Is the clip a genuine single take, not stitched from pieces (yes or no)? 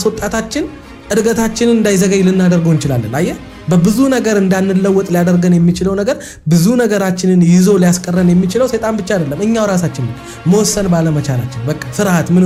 yes